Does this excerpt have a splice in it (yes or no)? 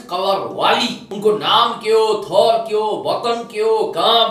yes